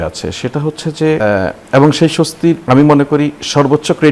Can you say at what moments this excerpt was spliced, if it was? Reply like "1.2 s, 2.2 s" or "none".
1.2 s, 2.6 s